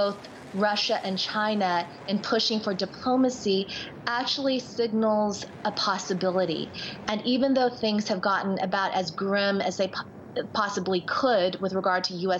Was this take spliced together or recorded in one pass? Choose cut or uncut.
cut